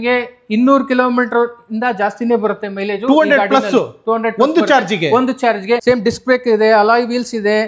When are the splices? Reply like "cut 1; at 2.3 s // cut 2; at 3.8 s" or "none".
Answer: cut 1; at 5.8 s